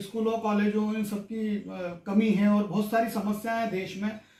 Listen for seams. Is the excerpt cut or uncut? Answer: uncut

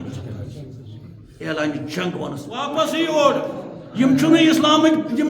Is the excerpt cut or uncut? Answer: cut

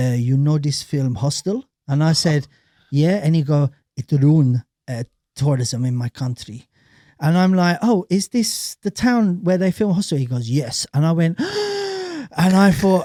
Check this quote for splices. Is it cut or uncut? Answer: uncut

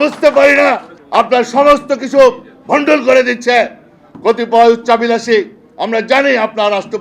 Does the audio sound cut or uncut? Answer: cut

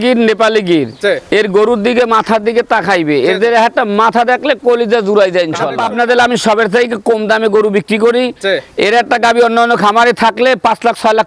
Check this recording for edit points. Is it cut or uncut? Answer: cut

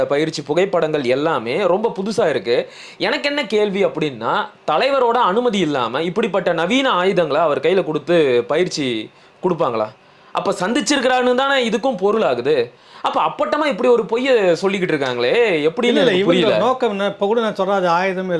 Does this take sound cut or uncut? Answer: uncut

